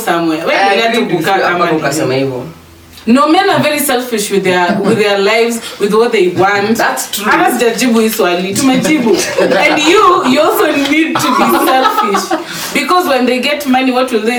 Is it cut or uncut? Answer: uncut